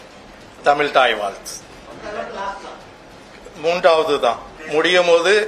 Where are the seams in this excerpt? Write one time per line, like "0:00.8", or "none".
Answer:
0:01.8
0:04.5